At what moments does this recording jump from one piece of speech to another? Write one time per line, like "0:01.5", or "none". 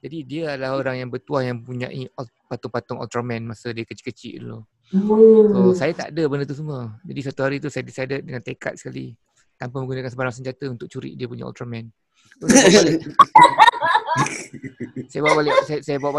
none